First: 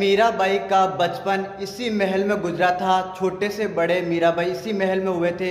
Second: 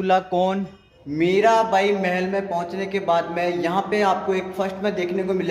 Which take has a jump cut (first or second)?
second